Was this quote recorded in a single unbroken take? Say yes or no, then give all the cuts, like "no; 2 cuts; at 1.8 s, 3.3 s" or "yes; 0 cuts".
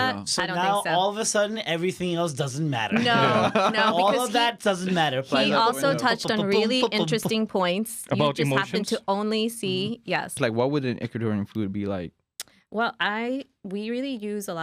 no; 1 cut; at 10.4 s